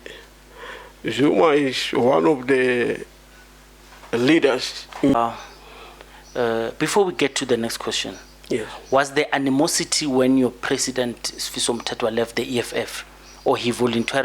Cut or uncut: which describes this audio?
cut